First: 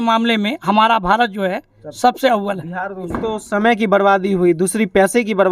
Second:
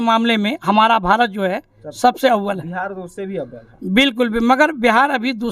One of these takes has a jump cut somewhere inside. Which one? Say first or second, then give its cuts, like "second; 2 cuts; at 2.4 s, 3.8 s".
first; 1 cut; at 3.1 s